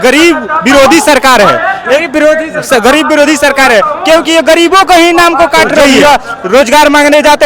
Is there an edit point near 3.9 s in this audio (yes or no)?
no